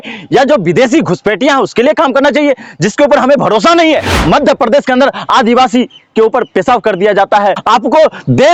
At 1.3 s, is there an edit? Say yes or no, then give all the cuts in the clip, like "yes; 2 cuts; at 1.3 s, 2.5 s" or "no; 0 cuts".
no; 2 cuts; at 4.1 s, 7.6 s